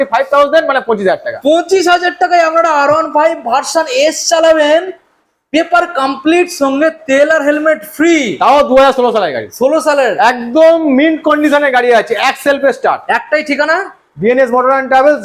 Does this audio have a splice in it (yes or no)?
no